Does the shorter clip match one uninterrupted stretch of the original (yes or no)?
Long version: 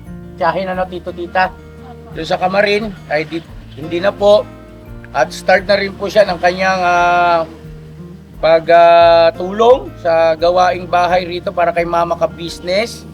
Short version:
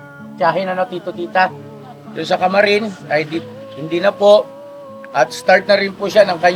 yes